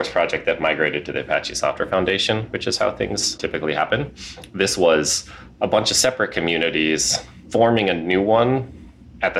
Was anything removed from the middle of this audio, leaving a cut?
yes; 2 cuts; at 3.4 s, 7.4 s

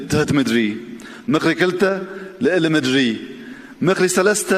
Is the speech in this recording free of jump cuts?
yes; 0 cuts

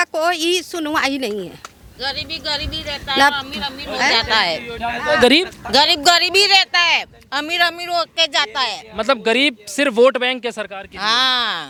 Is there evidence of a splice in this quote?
no; 0 cuts

